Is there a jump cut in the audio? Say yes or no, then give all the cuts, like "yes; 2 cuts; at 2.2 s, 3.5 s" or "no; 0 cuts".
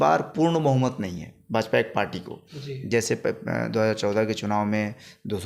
no; 0 cuts